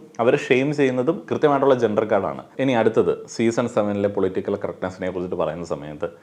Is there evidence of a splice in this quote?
yes; 1 cut; at 2.5 s

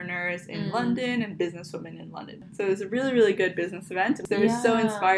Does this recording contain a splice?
yes; 2 cuts; at 2.4 s, 4.2 s

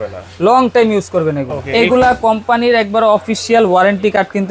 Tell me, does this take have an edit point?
yes; 1 cut; at 1.6 s

